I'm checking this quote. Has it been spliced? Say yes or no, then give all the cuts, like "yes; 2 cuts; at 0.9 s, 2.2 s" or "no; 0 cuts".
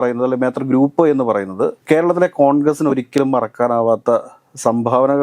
yes; 1 cut; at 1.8 s